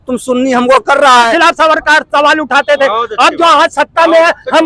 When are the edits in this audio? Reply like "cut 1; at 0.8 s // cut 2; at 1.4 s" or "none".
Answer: cut 1; at 1.3 s

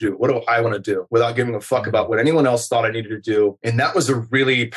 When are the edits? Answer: cut 1; at 1.0 s

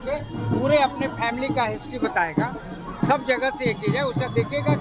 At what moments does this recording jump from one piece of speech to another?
none

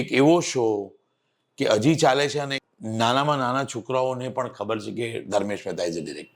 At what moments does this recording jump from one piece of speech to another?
cut 1; at 2.6 s

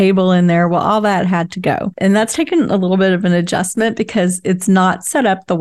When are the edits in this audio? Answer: cut 1; at 1.9 s

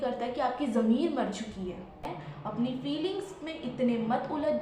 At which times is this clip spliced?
cut 1; at 2.1 s

